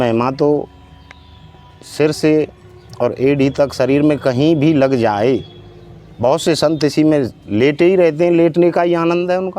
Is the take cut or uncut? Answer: uncut